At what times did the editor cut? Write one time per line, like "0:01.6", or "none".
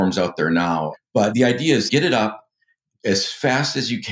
0:00.9
0:01.9

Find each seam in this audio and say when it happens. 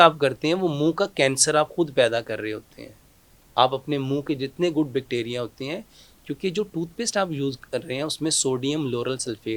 none

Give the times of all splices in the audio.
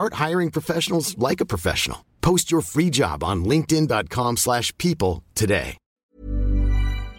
0:06.0

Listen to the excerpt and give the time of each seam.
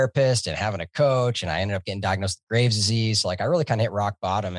none

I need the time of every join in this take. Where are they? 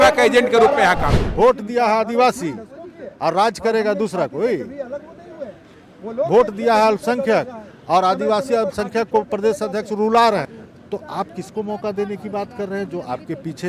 0:01.2
0:10.6

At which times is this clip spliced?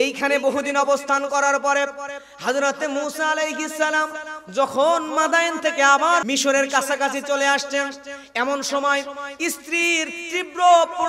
0:06.2

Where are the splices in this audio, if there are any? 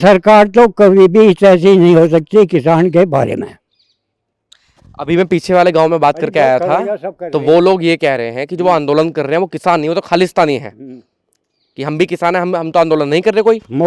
none

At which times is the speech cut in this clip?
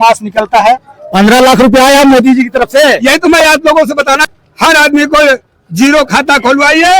0:00.9
0:04.3

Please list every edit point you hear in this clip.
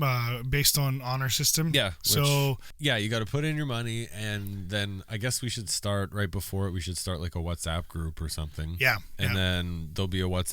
0:02.7

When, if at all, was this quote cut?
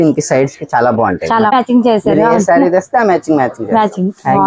0:01.5

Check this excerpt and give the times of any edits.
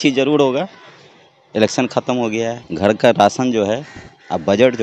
0:02.6

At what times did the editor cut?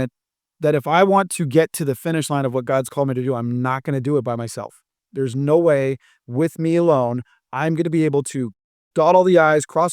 none

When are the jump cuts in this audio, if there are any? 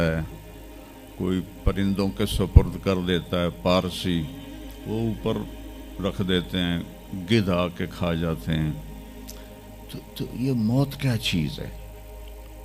none

